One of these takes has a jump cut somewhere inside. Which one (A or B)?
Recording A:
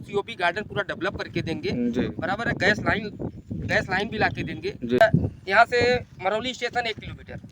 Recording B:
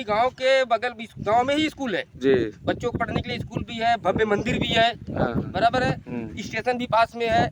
A